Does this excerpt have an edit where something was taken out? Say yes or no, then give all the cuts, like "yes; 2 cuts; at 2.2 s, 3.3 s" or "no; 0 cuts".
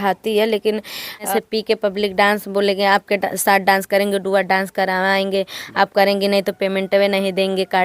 yes; 1 cut; at 1.3 s